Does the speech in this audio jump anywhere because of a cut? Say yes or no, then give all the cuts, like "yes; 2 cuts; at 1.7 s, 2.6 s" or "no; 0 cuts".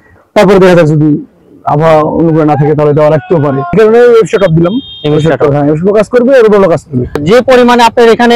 yes; 2 cuts; at 3.7 s, 7.2 s